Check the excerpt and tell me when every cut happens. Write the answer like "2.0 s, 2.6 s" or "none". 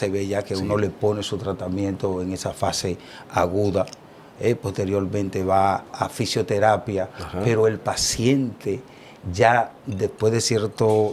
none